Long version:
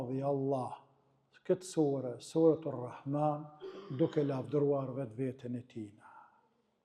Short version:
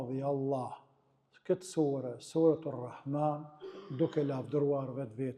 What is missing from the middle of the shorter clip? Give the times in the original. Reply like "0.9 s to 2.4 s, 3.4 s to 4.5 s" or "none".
none